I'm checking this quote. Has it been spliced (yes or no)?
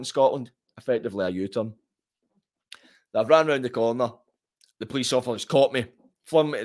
no